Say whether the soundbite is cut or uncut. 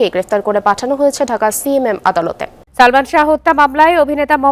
cut